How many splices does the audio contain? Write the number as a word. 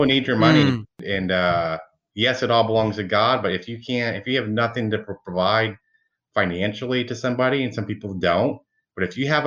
one